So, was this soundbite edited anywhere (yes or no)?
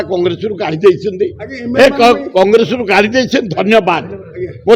no